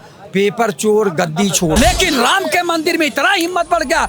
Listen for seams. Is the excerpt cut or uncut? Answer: cut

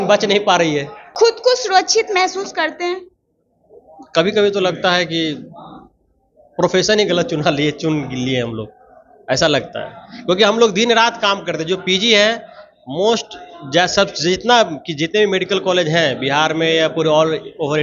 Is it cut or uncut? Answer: cut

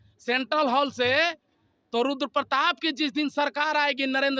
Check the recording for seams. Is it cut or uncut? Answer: uncut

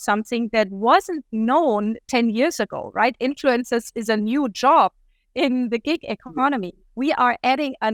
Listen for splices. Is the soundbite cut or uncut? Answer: uncut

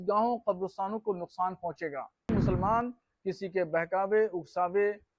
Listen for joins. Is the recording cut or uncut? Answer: cut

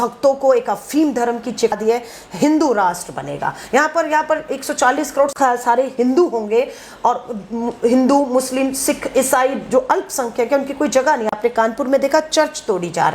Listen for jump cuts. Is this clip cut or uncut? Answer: cut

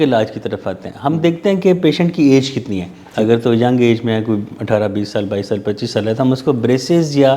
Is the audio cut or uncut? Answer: uncut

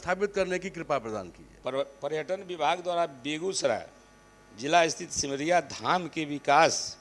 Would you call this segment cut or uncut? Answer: cut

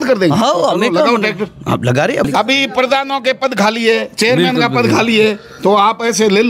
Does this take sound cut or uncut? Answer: cut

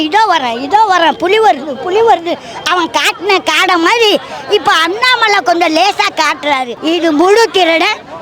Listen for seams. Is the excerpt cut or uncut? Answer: cut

